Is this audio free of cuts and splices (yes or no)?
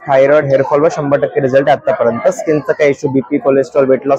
yes